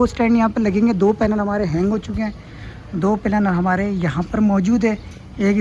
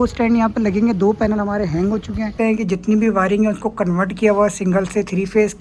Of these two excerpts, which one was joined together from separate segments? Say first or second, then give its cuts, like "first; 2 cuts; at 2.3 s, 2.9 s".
second; 1 cut; at 2.3 s